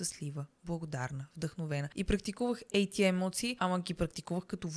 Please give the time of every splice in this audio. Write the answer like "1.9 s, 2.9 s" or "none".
1.9 s, 3.6 s